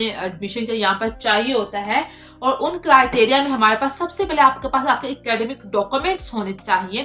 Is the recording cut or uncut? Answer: uncut